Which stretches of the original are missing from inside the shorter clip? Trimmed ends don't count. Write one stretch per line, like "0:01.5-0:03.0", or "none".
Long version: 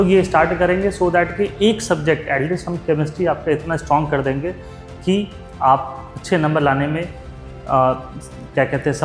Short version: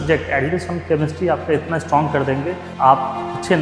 0:04.6-0:05.4